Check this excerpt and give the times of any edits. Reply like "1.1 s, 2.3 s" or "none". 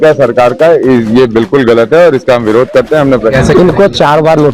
3.3 s